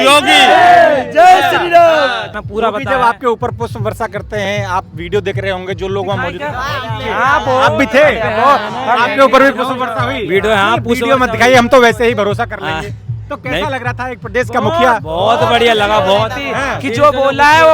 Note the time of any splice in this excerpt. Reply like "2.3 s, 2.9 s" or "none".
2.3 s

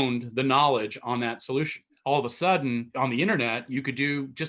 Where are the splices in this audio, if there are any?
1.8 s, 2.9 s

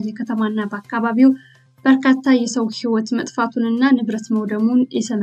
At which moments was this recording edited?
none

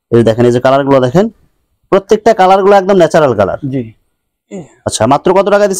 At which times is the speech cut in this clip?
none

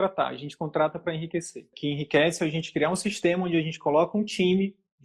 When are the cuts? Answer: 1.7 s

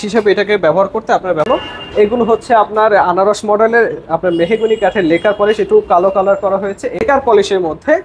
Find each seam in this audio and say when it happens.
1.5 s, 7.0 s

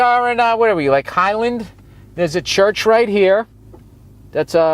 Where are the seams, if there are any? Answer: none

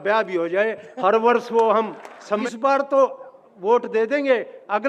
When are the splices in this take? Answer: 2.4 s

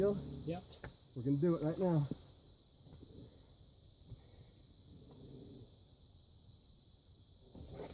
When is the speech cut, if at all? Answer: 1.0 s

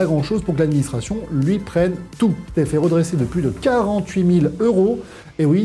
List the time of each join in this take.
2.4 s

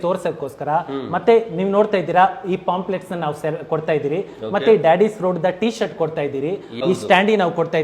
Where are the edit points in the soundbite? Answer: 6.7 s

